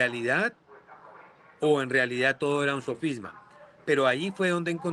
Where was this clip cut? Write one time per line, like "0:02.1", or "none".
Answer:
none